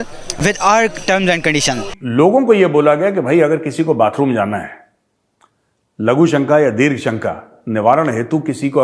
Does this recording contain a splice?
yes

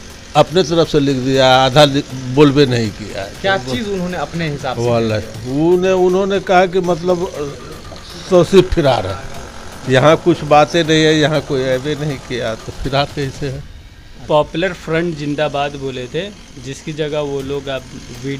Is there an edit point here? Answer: yes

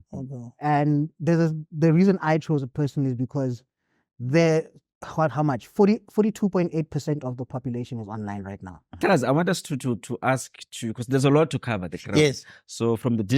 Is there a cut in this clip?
yes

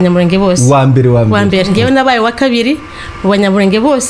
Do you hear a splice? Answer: yes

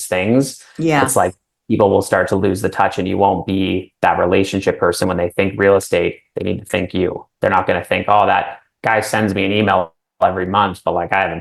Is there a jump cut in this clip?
no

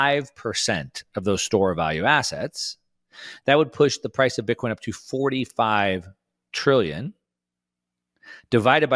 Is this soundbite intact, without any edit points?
yes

